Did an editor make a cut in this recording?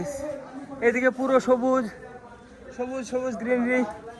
no; 0 cuts

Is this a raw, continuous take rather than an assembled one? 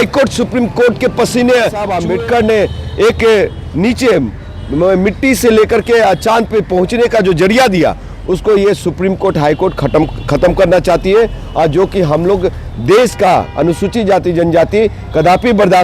no; 1 cut; at 1.9 s

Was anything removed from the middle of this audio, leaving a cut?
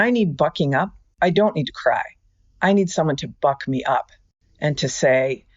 no; 0 cuts

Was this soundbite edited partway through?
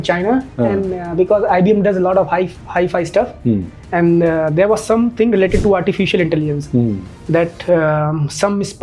no; 0 cuts

